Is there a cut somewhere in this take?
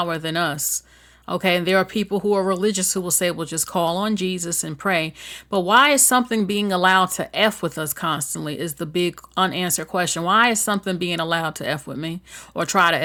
no; 0 cuts

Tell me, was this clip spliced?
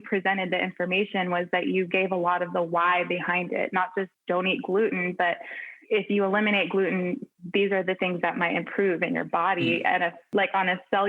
yes; 2 cuts; at 4.2 s, 10.2 s

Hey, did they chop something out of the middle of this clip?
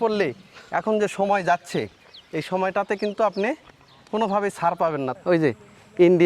yes; 1 cut; at 5.1 s

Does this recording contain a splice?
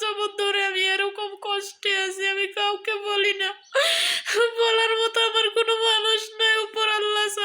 no; 0 cuts

